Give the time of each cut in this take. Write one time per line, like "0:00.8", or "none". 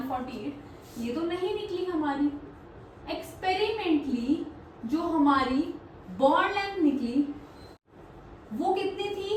none